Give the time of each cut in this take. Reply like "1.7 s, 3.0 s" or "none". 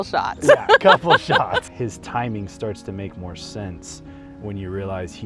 1.7 s